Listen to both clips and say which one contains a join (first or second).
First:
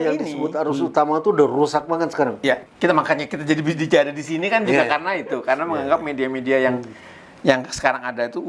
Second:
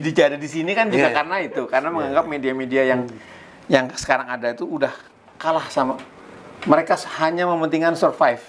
first